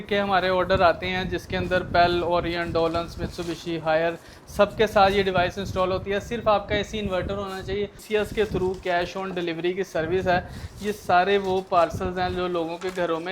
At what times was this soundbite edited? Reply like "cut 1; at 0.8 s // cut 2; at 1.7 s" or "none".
cut 1; at 8.0 s

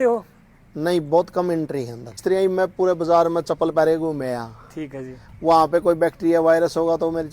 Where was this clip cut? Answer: cut 1; at 2.2 s

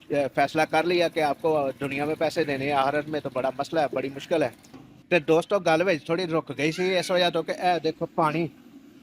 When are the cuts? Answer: cut 1; at 4.8 s

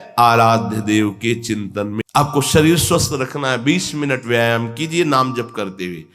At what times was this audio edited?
cut 1; at 2.0 s

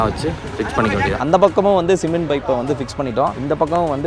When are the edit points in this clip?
cut 1; at 1.2 s

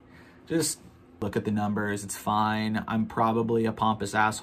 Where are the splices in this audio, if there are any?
cut 1; at 0.9 s

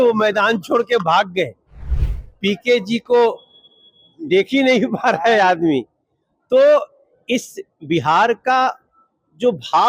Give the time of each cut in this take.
cut 1; at 1.9 s

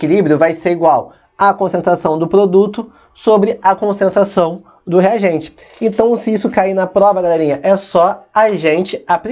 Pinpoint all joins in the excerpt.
none

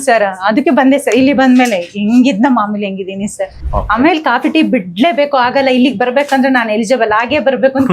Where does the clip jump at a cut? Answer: cut 1; at 3.6 s

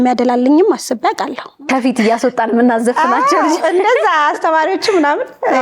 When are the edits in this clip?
cut 1; at 1.7 s

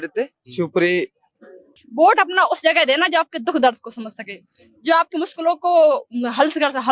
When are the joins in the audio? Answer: cut 1; at 1.7 s

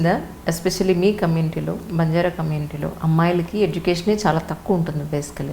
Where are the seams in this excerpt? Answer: none

